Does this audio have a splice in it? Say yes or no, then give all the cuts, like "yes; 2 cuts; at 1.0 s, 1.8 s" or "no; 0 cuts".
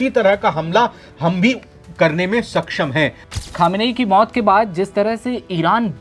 yes; 1 cut; at 3.4 s